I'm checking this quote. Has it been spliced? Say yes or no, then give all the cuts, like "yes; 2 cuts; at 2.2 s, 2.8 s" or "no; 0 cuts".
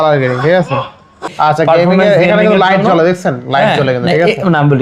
yes; 1 cut; at 1.3 s